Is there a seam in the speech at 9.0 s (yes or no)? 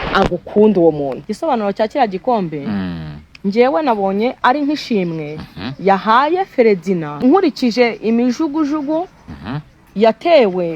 no